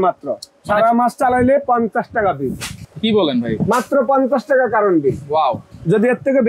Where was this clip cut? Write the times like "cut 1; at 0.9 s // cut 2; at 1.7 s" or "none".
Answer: none